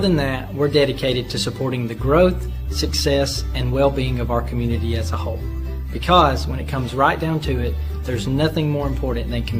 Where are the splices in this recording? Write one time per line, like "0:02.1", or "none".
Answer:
0:08.7